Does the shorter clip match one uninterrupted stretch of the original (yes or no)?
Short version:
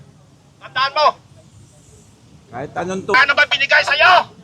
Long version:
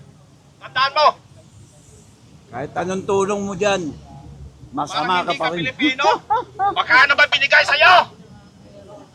no